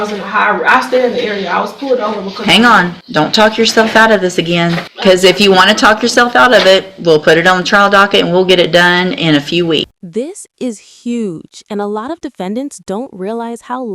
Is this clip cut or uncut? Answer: cut